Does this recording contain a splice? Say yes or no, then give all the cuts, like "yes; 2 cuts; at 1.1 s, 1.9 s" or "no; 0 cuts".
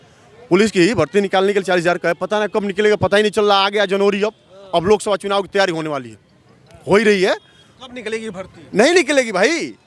no; 0 cuts